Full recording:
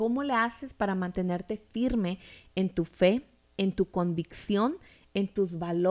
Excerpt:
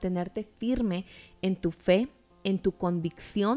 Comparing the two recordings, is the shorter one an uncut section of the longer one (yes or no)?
yes